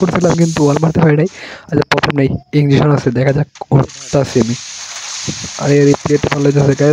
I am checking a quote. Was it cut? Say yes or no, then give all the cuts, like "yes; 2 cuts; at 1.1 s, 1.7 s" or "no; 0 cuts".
no; 0 cuts